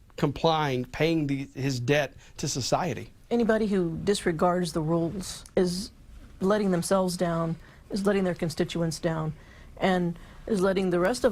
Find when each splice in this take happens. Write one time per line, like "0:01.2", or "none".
none